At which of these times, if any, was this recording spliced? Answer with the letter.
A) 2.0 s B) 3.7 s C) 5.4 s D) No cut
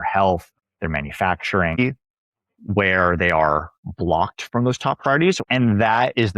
C